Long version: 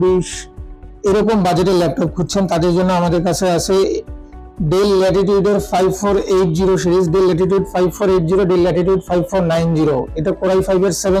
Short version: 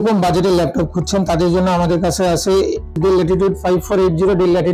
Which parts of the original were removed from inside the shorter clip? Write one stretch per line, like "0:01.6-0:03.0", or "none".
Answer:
0:04.2-0:07.1